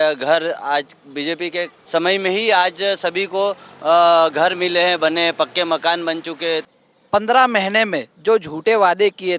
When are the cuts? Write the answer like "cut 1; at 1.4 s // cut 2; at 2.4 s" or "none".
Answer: cut 1; at 1.8 s // cut 2; at 6.7 s